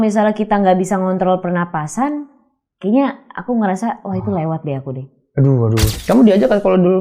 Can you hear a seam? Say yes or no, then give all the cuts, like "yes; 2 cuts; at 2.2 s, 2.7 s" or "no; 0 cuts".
yes; 1 cut; at 5.9 s